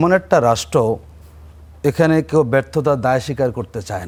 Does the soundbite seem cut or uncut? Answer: uncut